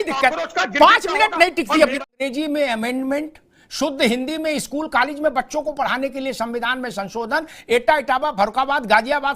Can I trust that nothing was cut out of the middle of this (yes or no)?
no